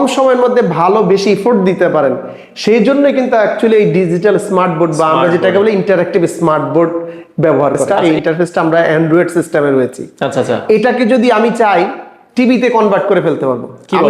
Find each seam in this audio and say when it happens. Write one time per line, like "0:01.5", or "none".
0:07.9